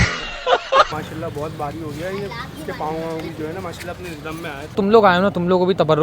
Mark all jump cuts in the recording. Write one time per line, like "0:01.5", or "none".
0:01.0
0:04.8